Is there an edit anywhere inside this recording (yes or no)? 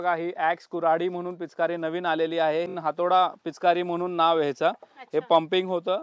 yes